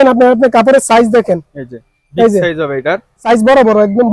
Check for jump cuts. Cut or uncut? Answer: cut